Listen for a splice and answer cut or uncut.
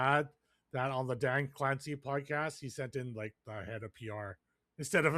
uncut